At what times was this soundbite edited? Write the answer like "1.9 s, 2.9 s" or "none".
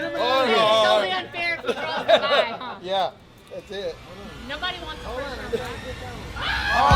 none